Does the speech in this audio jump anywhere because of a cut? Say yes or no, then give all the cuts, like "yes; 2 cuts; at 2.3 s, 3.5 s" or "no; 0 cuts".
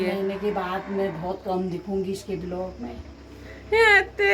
no; 0 cuts